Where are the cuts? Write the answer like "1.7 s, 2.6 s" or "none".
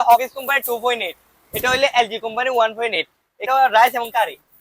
3.3 s